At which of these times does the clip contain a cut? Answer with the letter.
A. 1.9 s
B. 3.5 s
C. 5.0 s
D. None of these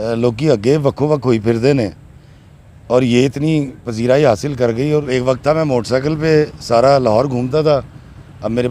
C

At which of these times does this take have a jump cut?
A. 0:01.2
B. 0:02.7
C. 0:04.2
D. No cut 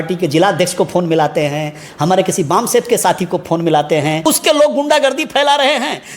C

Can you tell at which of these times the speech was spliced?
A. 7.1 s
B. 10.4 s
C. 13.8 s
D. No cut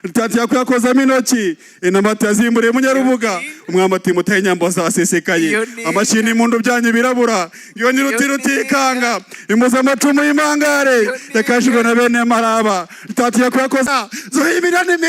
C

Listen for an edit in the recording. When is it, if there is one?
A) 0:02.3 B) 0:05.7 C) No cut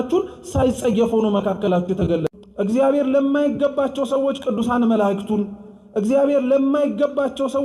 A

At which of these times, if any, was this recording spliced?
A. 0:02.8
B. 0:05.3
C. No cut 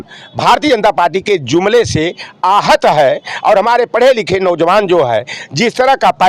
C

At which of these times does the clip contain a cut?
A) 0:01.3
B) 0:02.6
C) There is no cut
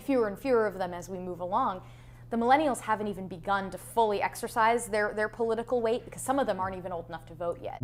C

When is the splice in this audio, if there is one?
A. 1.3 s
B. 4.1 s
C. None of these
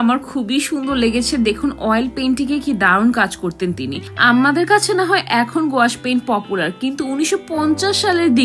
B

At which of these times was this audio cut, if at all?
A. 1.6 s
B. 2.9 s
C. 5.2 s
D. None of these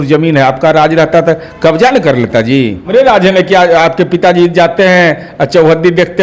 B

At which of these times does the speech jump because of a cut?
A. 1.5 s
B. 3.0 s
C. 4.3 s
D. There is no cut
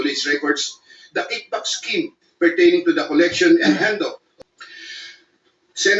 C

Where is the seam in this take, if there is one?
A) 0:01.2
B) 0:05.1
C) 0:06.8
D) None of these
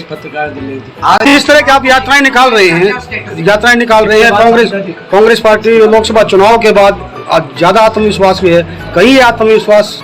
A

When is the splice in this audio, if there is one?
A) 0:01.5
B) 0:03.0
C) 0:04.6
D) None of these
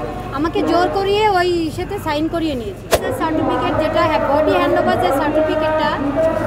B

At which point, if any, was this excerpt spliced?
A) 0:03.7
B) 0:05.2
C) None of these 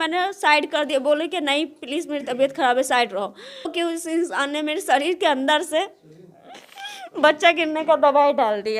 A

